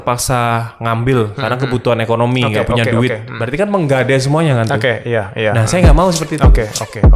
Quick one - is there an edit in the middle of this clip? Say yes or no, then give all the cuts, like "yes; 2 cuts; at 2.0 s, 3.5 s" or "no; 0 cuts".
no; 0 cuts